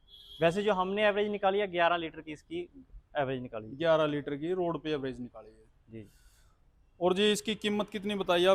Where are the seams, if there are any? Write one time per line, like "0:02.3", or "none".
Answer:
none